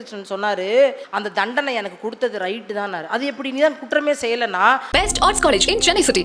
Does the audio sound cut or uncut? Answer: cut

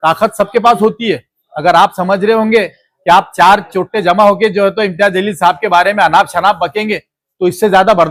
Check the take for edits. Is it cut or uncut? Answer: uncut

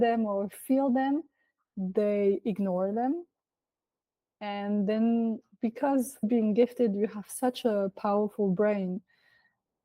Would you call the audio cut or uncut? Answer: cut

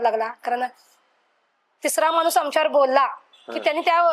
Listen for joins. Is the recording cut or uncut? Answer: uncut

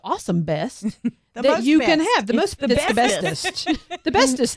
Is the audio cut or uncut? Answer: uncut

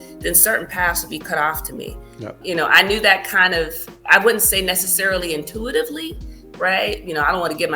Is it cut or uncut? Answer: cut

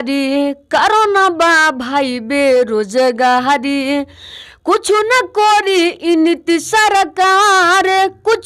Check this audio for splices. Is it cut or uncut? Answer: uncut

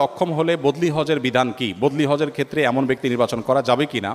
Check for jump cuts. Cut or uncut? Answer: uncut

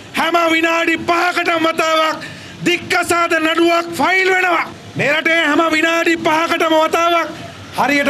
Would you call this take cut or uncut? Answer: uncut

